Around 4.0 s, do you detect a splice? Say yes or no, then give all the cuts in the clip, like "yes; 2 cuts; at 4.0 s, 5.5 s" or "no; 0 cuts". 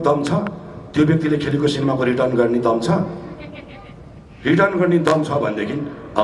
no; 0 cuts